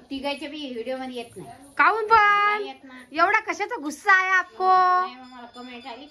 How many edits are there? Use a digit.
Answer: 0